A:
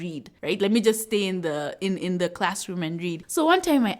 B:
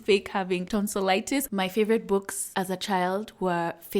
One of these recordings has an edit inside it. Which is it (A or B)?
B